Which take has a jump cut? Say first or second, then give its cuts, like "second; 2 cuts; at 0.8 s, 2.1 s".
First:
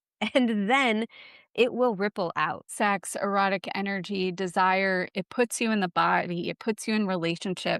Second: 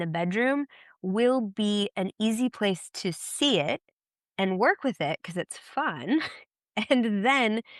first; 2 cuts; at 2.7 s, 5.1 s